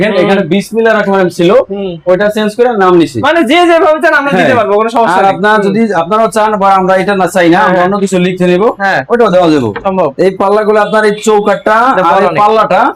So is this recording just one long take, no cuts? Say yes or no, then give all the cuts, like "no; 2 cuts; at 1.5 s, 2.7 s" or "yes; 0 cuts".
yes; 0 cuts